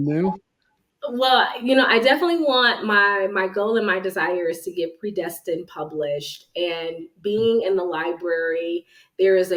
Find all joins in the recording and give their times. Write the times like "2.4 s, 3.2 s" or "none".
none